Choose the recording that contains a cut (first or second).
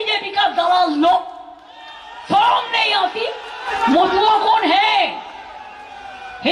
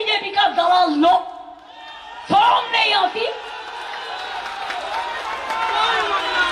first